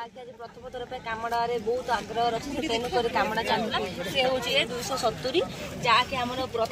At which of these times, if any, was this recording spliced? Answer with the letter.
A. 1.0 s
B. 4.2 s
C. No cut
C